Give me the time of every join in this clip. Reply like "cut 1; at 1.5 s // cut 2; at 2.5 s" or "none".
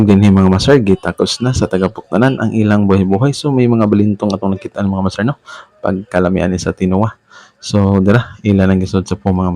none